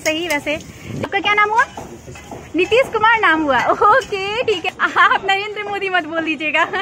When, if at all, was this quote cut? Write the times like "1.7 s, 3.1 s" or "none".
1.0 s, 4.3 s